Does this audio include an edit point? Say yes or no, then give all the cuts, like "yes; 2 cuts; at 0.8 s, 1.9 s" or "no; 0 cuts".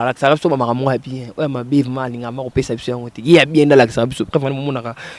no; 0 cuts